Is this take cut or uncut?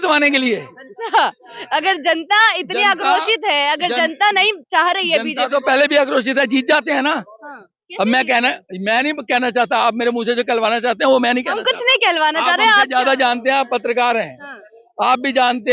uncut